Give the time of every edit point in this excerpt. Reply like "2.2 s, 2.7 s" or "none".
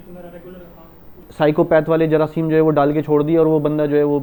1.2 s